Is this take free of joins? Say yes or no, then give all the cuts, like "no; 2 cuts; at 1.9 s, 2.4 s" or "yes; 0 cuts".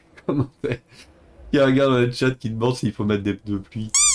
yes; 0 cuts